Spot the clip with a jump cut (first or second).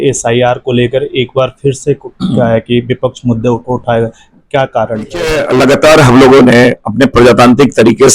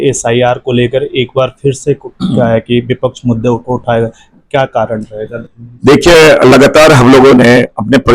first